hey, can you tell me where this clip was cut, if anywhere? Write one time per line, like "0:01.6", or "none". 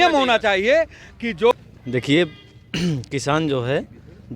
0:01.5